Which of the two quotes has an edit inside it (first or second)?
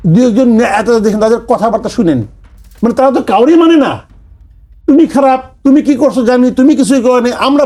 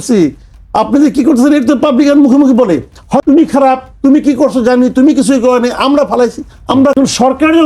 second